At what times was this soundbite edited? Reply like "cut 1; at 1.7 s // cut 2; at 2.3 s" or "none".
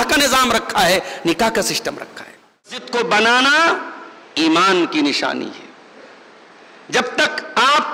cut 1; at 2.8 s